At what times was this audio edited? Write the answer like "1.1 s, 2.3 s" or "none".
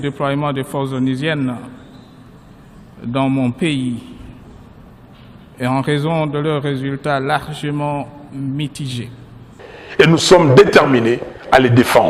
none